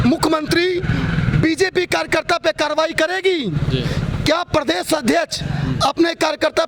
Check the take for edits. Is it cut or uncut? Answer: uncut